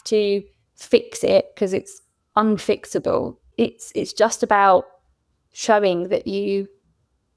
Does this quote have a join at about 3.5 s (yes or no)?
yes